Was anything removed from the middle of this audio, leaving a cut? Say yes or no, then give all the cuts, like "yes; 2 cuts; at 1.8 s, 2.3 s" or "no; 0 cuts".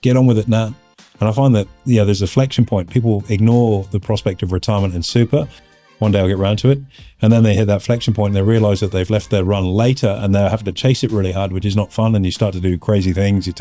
no; 0 cuts